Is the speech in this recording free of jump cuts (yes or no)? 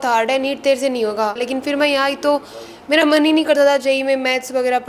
no